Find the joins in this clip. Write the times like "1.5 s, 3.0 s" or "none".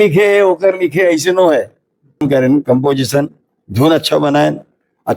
2.2 s